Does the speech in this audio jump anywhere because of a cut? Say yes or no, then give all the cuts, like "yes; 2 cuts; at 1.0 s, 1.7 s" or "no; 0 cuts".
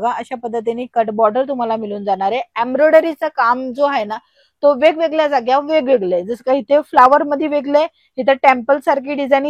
no; 0 cuts